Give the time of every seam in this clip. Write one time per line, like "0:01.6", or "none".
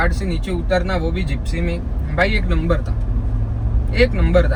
none